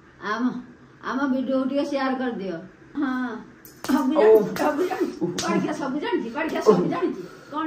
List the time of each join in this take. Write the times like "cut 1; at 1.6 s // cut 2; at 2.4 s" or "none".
cut 1; at 3.0 s